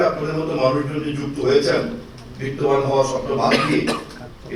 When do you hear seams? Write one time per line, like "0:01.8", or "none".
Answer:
none

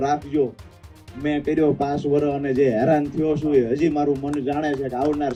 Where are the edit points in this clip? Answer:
none

